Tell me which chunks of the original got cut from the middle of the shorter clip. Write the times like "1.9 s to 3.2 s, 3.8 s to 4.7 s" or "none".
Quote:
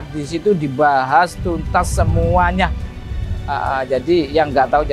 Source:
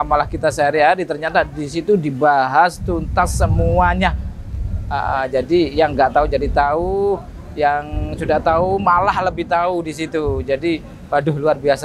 none